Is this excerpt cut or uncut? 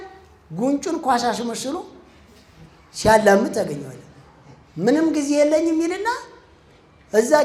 uncut